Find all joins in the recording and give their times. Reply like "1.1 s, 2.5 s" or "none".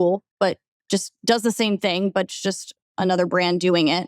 none